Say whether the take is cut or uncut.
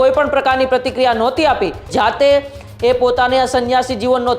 cut